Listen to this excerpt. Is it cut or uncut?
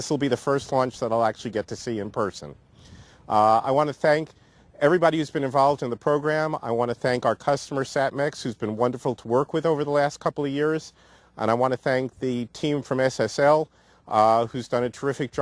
cut